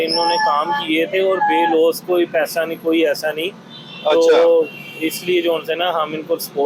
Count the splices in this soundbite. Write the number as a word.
zero